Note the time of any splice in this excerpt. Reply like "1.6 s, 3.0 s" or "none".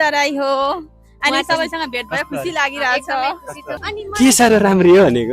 3.8 s